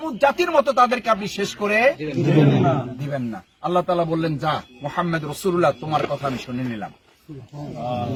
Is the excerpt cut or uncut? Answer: uncut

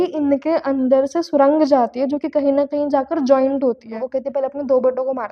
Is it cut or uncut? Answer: cut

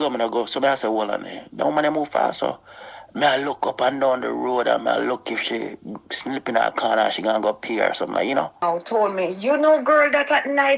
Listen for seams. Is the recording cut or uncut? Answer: cut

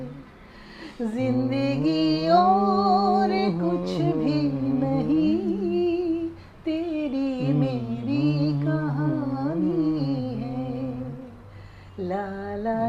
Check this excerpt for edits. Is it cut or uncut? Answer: uncut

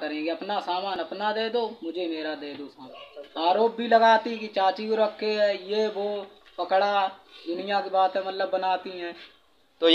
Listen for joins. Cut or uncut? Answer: uncut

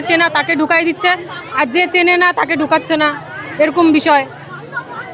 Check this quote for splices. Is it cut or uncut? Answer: uncut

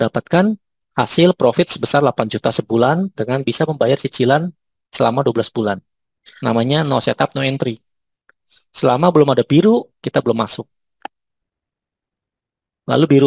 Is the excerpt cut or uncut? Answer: cut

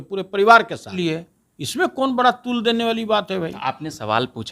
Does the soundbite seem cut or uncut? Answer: cut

